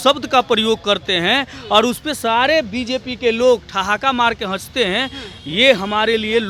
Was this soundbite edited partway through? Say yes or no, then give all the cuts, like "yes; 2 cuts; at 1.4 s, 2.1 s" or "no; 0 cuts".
no; 0 cuts